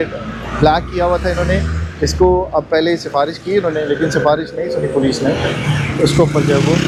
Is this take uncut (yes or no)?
yes